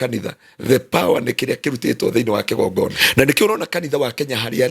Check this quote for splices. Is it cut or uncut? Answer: cut